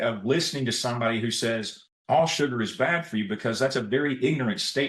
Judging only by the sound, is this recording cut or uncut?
uncut